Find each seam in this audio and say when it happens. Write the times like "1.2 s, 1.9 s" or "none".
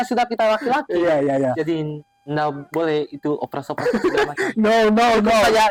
none